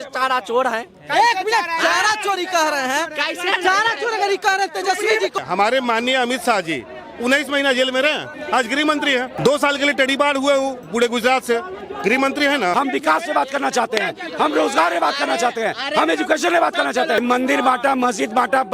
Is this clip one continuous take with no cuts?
no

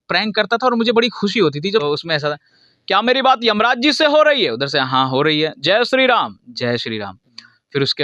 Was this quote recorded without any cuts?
no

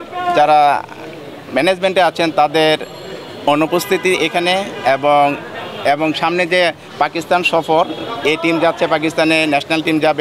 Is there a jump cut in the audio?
no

